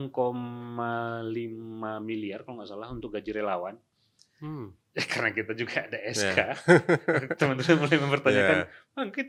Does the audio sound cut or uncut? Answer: uncut